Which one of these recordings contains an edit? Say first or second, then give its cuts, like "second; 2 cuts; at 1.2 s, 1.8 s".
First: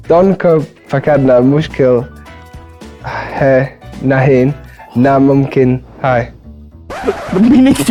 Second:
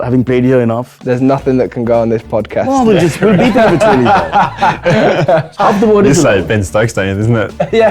second; 2 cuts; at 1.0 s, 5.5 s